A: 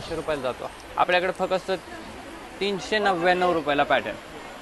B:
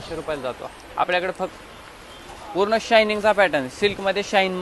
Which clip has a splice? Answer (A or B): B